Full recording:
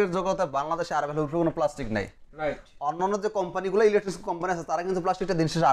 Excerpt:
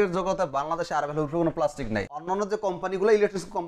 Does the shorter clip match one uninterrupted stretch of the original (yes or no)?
no